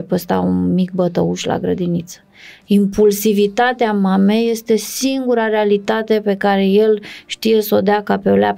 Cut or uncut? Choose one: uncut